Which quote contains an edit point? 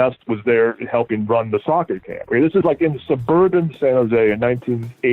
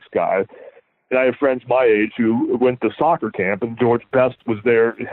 second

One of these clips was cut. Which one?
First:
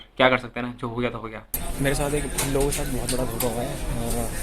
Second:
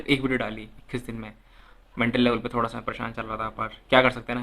first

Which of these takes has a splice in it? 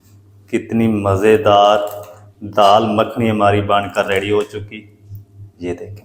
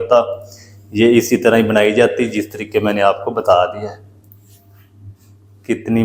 second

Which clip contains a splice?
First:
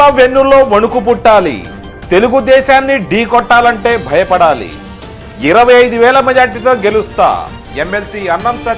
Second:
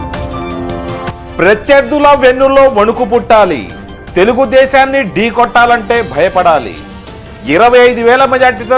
second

